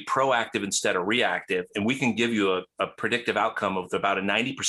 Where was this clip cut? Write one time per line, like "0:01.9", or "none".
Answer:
none